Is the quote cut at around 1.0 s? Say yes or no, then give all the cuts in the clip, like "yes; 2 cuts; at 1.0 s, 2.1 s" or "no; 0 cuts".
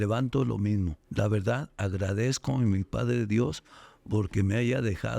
yes; 1 cut; at 1.0 s